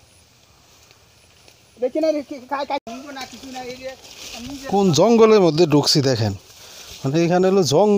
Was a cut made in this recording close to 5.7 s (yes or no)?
no